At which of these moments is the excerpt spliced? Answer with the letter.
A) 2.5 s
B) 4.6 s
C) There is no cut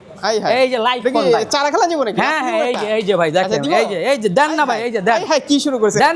C